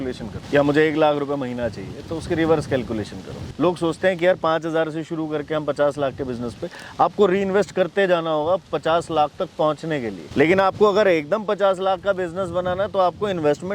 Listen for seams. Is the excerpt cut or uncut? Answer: cut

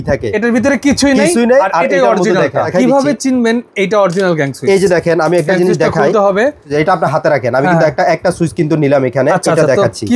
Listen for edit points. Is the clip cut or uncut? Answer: cut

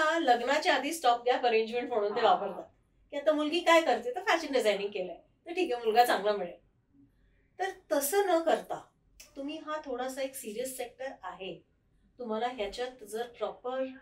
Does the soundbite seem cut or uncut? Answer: uncut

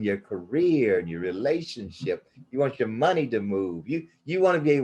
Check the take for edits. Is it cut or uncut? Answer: uncut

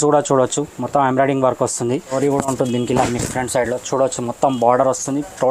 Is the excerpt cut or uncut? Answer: cut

